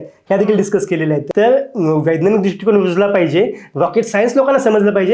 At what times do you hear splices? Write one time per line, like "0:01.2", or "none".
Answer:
0:01.2